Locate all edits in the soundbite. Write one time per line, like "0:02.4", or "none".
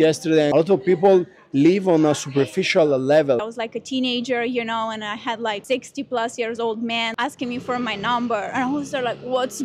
0:03.4
0:05.6
0:07.1